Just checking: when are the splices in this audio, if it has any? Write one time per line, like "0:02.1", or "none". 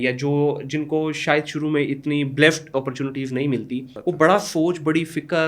0:03.9